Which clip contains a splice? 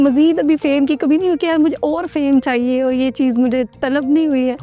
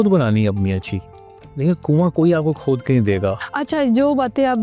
second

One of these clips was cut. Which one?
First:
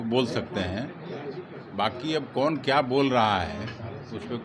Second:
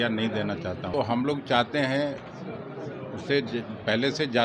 second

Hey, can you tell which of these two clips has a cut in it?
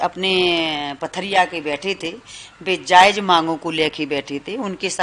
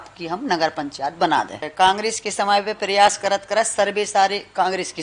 second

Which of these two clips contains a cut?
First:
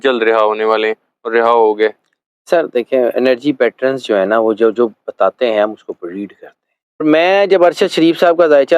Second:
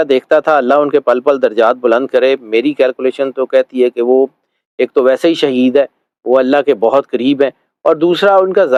first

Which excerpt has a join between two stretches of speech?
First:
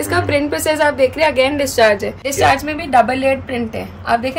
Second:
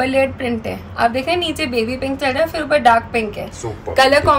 first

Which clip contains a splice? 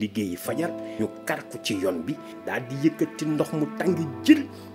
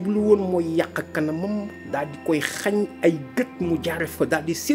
first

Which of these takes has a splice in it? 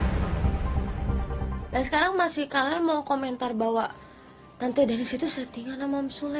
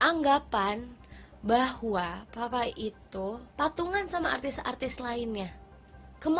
first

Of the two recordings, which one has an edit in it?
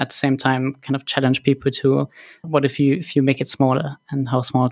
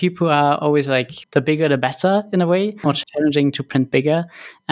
second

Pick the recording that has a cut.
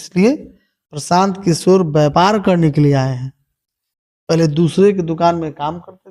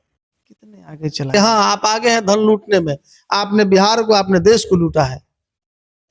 second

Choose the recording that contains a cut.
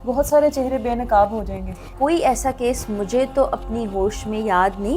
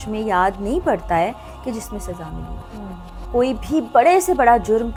first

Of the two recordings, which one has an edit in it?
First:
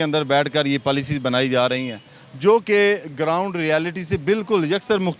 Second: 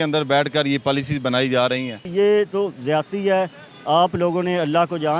second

